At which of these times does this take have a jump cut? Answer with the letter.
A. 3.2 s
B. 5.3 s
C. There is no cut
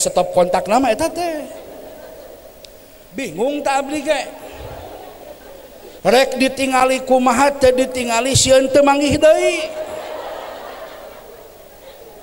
A